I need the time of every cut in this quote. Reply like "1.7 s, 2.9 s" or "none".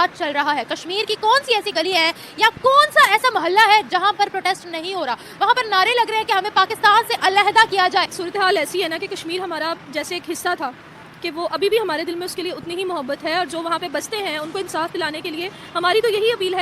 8.2 s